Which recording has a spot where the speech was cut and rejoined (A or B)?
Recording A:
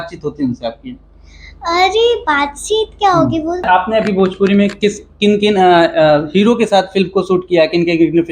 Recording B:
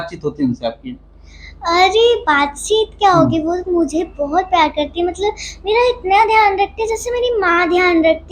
A